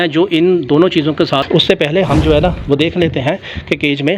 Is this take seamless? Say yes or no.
no